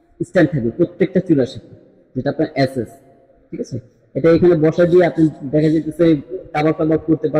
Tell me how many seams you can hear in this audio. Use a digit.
0